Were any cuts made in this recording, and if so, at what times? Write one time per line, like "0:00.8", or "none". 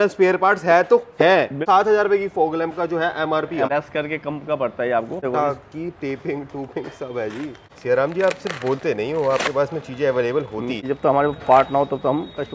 0:01.6
0:03.7
0:05.2
0:07.7
0:10.8